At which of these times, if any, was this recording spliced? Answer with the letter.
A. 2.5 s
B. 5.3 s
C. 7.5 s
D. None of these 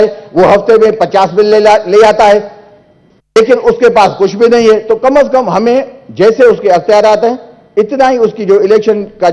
D